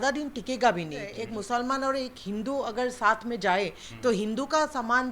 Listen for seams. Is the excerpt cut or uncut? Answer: cut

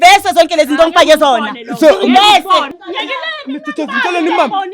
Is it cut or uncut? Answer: cut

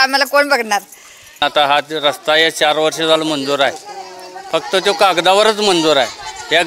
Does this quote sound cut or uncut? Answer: cut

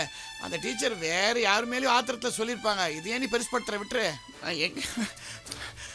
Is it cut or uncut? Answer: cut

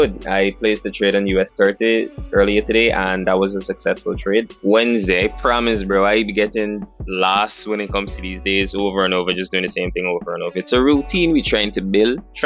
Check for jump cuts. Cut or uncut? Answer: cut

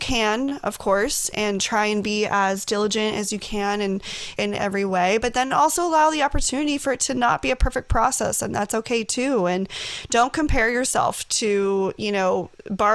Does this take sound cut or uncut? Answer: cut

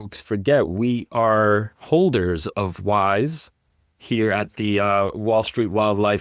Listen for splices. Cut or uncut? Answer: uncut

